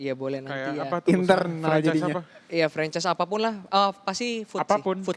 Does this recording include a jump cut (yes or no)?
no